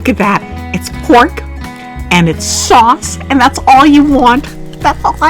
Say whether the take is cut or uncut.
uncut